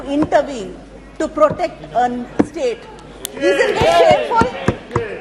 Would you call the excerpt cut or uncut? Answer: uncut